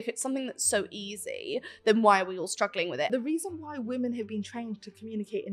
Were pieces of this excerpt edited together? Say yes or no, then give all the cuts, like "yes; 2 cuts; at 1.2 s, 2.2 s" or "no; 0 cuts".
yes; 1 cut; at 3.1 s